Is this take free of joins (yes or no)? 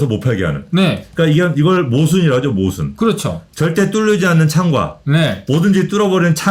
yes